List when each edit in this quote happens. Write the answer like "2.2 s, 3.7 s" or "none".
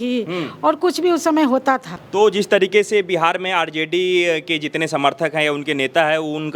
2.0 s